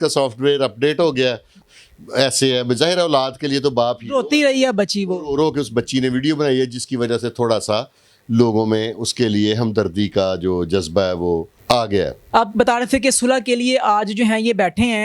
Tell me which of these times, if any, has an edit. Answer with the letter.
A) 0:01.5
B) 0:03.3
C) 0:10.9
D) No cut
A